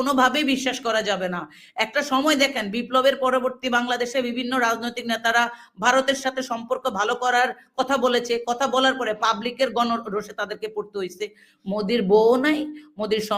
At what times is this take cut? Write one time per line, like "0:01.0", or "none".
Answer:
0:11.4